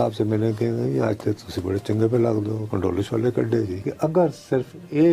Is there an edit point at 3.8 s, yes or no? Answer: yes